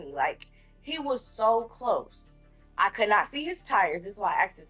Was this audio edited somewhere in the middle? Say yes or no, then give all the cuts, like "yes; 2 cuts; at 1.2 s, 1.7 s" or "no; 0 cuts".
no; 0 cuts